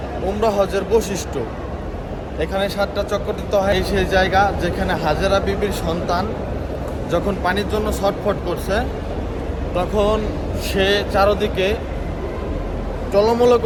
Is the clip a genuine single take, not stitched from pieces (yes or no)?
yes